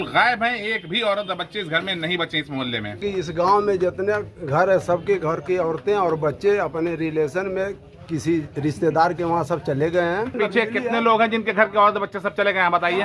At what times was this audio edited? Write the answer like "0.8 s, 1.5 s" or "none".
3.0 s, 10.3 s